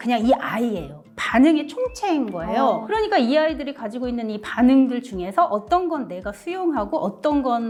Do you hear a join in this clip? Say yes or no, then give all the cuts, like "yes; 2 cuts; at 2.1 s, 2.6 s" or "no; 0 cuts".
no; 0 cuts